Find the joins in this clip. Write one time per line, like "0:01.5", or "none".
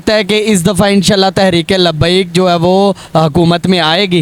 none